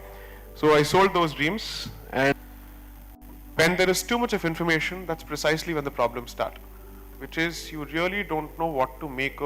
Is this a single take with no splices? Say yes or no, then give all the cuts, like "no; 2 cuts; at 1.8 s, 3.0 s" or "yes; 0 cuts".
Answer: no; 1 cut; at 2.3 s